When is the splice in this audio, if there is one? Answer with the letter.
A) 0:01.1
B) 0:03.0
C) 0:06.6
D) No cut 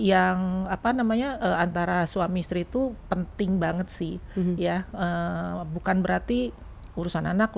D